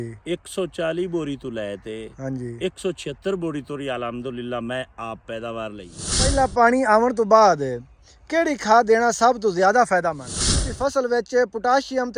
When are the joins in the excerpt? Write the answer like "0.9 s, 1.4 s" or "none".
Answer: 6.3 s, 10.6 s